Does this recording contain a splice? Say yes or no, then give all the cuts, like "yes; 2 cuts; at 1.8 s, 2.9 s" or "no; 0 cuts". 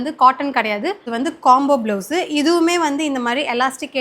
yes; 1 cut; at 1.1 s